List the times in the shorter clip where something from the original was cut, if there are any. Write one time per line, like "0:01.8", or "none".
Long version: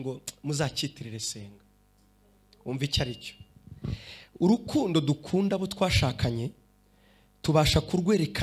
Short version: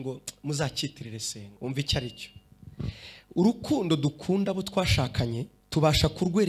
0:01.4
0:05.5